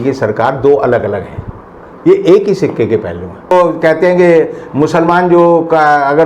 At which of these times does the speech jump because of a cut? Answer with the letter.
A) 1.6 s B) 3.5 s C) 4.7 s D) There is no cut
B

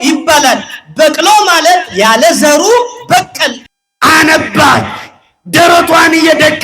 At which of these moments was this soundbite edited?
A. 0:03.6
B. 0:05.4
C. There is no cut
A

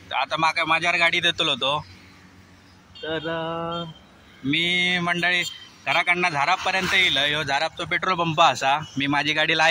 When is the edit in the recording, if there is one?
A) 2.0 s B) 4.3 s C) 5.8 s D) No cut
D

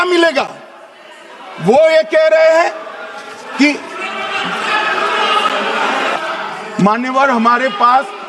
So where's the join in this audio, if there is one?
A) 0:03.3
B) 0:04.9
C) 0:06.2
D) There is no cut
C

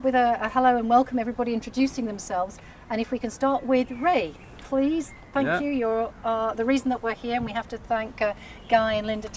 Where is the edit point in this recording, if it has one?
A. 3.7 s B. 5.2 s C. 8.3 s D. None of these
C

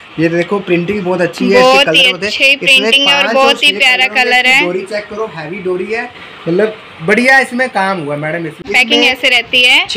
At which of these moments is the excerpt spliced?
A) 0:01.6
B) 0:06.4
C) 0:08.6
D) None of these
C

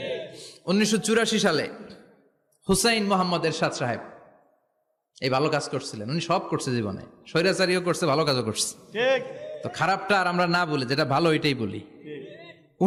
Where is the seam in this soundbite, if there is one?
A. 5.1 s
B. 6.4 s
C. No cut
C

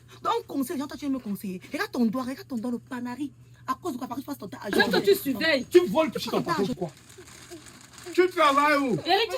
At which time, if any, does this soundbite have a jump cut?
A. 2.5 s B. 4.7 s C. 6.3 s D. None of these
B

